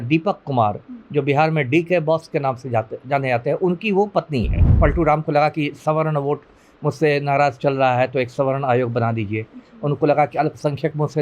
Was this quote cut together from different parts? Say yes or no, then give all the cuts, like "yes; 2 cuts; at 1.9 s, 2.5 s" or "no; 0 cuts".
yes; 1 cut; at 4.6 s